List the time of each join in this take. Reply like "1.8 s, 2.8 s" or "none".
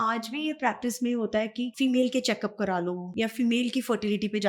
1.7 s, 3.1 s